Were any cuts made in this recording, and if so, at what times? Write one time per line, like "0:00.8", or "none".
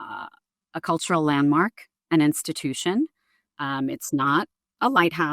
none